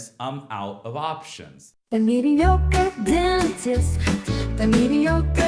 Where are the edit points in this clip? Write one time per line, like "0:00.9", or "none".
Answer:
0:01.7